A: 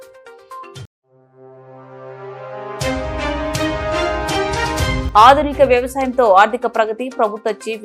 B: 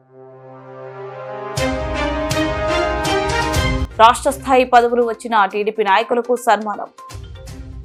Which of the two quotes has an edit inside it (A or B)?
A